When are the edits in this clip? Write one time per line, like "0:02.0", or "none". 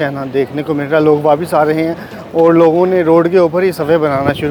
none